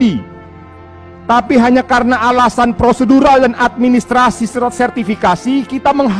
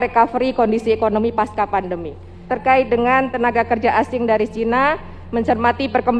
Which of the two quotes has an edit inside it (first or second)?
second